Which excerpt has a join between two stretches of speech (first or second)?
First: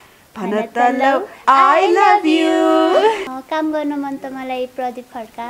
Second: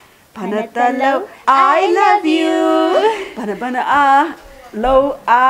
first